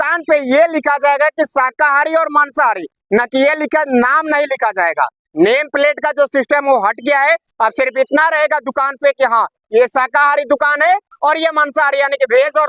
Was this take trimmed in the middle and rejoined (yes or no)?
no